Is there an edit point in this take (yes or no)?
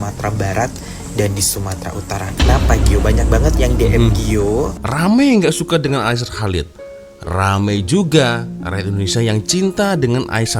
yes